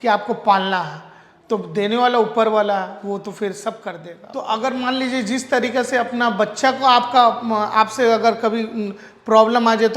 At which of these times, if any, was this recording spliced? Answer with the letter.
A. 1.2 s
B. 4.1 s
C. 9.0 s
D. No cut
B